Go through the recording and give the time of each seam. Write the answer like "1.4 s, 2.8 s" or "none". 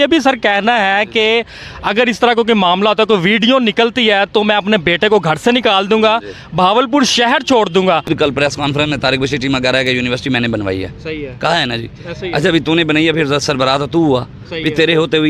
8.1 s